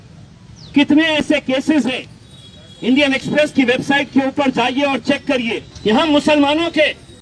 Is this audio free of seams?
no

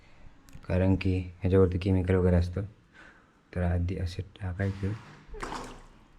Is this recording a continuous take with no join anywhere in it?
yes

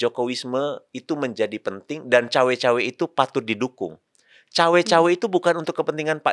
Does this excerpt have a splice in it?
no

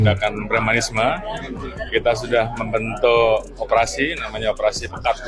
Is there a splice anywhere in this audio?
no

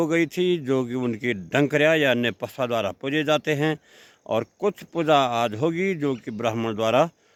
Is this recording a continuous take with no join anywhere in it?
yes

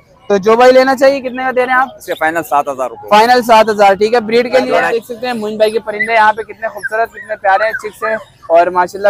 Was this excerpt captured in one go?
no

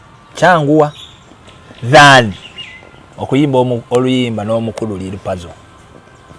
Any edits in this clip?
no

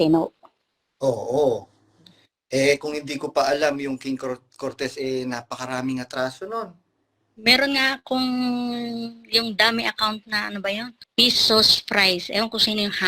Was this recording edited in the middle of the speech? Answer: yes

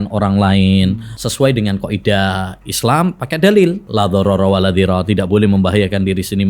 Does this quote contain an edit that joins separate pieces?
yes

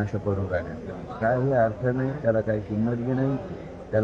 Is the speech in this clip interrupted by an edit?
no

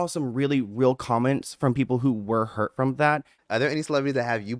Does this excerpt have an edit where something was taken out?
yes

